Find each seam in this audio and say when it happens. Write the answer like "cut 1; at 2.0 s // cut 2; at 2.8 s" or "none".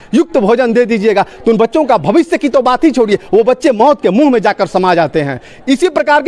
none